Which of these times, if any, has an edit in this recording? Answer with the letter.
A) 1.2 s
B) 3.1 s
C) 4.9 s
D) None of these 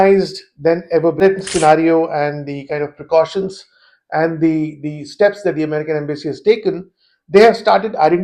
A